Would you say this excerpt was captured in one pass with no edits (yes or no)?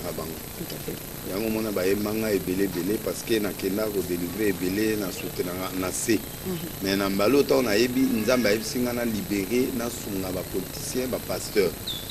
yes